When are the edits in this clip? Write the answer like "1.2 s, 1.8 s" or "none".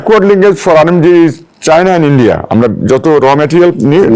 none